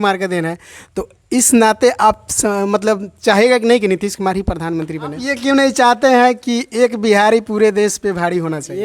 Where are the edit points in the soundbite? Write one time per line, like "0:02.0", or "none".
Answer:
0:05.3